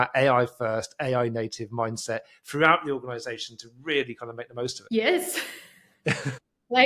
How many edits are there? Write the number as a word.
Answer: one